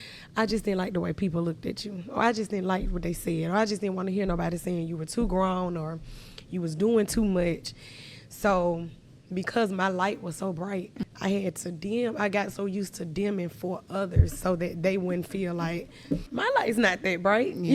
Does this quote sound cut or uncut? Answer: cut